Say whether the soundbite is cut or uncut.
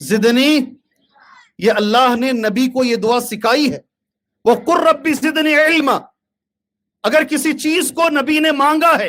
uncut